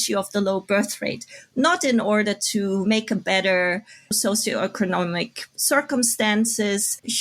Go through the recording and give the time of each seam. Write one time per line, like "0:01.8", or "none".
none